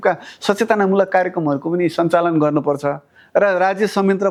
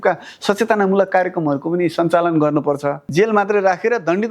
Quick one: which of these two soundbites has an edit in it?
second; 1 cut; at 3.0 s

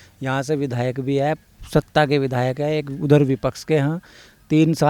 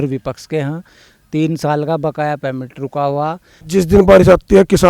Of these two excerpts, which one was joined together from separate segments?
second; 1 cut; at 3.5 s

